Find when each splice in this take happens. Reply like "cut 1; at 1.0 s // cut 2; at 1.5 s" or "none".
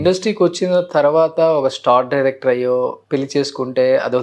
cut 1; at 3.0 s